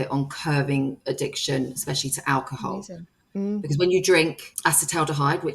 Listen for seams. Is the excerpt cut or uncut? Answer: cut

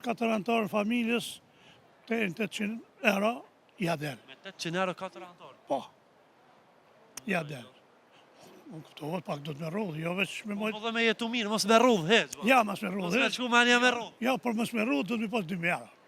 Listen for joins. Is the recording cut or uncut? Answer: uncut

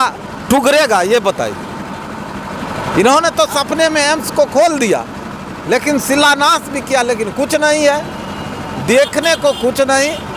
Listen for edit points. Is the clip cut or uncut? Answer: uncut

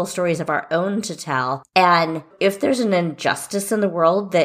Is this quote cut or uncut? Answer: cut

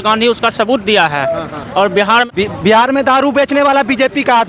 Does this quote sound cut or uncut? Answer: cut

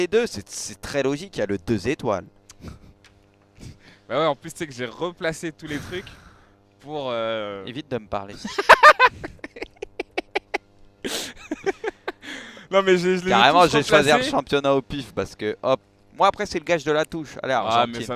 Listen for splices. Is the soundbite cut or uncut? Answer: cut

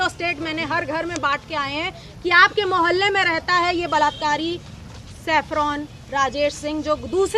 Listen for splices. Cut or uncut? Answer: uncut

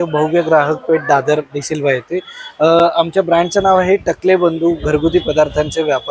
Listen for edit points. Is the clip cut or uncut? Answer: uncut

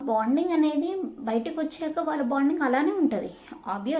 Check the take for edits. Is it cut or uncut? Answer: uncut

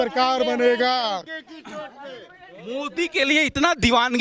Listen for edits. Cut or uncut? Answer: uncut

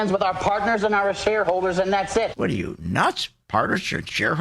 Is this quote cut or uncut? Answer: cut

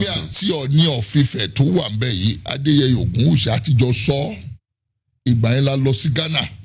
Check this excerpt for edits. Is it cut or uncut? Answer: cut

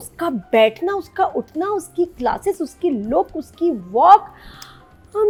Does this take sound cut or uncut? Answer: uncut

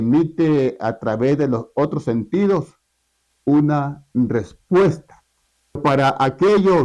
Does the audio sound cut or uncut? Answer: cut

